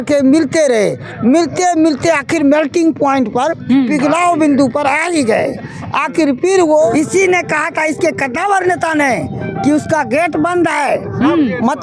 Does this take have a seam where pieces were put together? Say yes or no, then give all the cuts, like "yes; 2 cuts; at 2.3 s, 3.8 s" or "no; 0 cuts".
yes; 1 cut; at 6.9 s